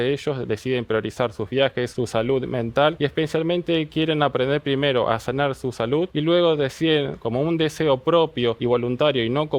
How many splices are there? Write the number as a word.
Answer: four